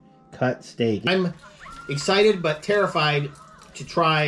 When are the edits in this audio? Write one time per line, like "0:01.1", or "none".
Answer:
0:01.0